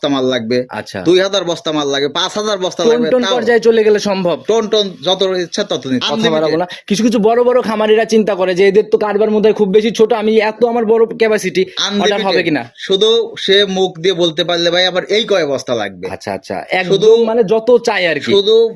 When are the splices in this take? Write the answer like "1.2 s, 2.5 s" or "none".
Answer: 6.0 s